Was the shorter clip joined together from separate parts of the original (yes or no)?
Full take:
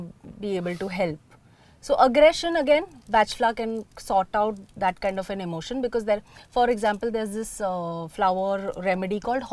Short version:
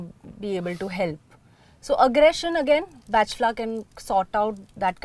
no